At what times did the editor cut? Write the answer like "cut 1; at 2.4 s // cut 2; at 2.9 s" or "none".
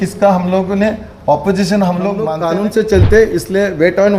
cut 1; at 2.4 s